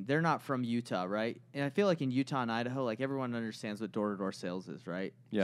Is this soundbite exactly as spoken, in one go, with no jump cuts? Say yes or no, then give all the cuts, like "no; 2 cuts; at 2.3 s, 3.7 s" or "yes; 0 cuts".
yes; 0 cuts